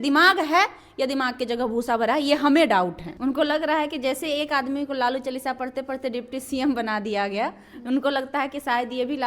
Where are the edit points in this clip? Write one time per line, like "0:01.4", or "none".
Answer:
0:03.0